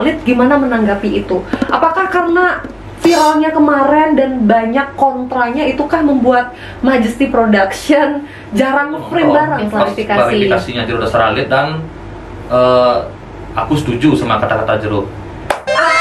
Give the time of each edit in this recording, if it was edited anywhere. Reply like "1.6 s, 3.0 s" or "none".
9.6 s